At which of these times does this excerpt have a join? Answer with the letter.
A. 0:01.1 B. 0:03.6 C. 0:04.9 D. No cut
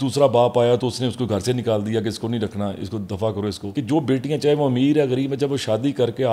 B